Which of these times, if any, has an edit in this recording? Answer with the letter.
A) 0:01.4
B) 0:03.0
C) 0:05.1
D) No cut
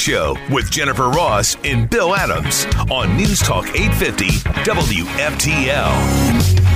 D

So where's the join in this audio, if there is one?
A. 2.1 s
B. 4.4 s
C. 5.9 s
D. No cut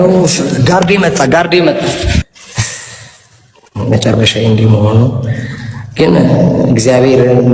A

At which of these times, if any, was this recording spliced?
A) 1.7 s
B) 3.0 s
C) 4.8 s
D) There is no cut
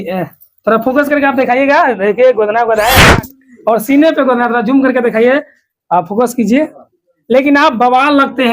B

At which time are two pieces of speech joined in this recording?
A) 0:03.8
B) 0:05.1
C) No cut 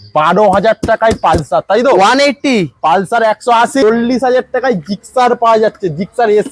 A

